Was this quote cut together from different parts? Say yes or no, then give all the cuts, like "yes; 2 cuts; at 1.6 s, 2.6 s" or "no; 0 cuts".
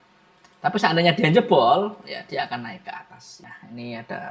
yes; 1 cut; at 3.4 s